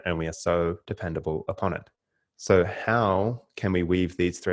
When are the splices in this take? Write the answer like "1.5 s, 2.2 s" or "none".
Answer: none